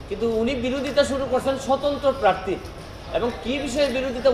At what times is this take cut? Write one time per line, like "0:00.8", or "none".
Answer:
none